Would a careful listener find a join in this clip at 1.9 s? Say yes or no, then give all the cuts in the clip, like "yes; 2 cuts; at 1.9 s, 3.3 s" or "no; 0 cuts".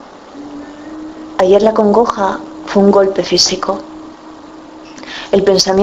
yes; 1 cut; at 1.9 s